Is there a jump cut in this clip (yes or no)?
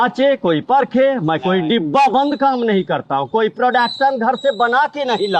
no